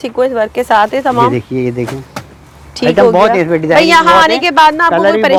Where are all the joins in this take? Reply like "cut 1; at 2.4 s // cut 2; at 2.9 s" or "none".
none